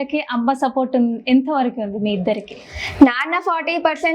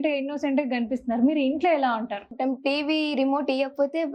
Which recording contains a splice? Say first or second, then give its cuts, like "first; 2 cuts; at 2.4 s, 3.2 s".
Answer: second; 1 cut; at 2.3 s